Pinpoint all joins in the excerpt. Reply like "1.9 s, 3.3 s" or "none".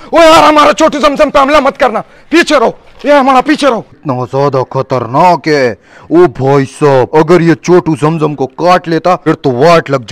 4.0 s, 9.2 s